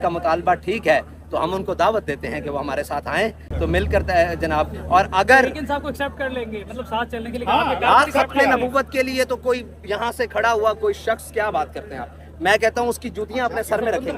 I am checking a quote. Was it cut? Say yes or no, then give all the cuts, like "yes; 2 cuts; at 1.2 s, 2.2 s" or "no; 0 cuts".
no; 0 cuts